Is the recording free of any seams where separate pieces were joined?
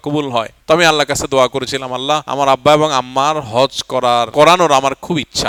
yes; 0 cuts

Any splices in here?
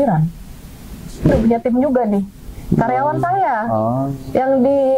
yes; 1 cut; at 1.3 s

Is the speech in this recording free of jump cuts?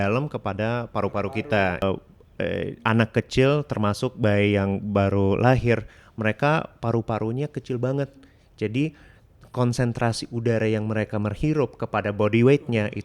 no; 1 cut; at 1.8 s

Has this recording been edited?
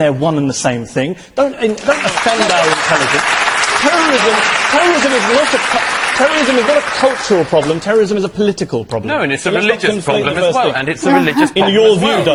no; 0 cuts

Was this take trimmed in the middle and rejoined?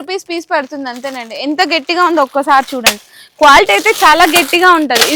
no; 0 cuts

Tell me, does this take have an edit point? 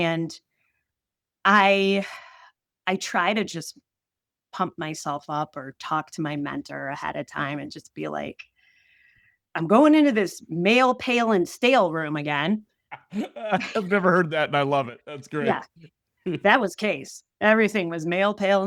no; 0 cuts

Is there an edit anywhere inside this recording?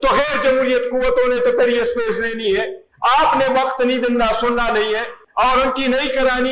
yes; 2 cuts; at 2.8 s, 5.2 s

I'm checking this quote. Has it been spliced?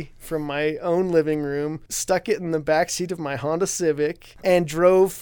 yes; 2 cuts; at 1.9 s, 4.3 s

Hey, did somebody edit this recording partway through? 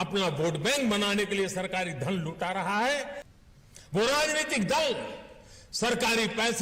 yes; 1 cut; at 3.2 s

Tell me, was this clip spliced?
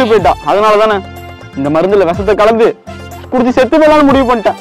no; 0 cuts

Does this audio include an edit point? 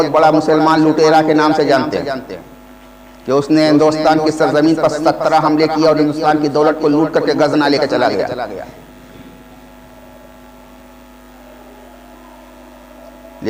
no; 0 cuts

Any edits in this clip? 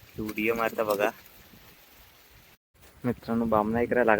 yes; 1 cut; at 2.6 s

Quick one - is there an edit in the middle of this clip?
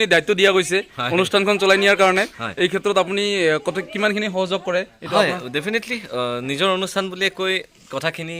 no; 0 cuts

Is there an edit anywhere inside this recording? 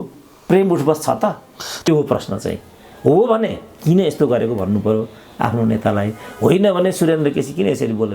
yes; 1 cut; at 1.9 s

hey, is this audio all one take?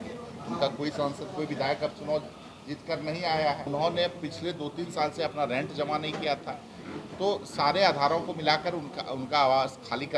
no; 1 cut; at 3.7 s

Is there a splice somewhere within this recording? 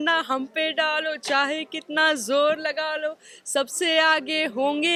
no; 0 cuts

